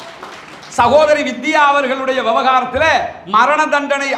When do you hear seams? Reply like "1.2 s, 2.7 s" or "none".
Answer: none